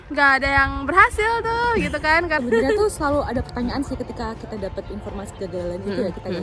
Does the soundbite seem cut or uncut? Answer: cut